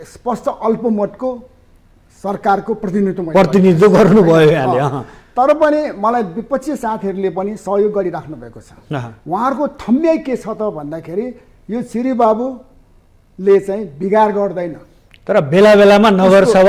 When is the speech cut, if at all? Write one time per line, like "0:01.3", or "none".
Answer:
none